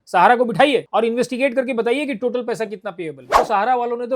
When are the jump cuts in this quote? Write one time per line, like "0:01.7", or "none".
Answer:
0:00.9
0:03.2